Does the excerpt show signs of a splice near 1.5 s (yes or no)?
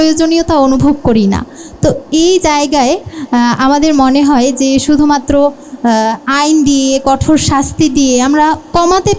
no